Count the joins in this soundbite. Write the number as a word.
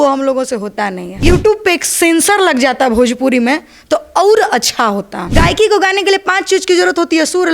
two